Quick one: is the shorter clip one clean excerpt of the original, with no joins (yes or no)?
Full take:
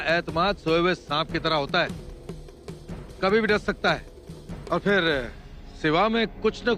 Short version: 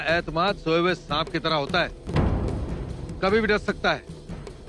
yes